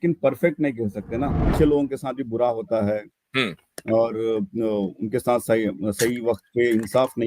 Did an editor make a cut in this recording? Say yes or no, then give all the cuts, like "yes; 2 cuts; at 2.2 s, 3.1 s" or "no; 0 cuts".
yes; 1 cut; at 1.4 s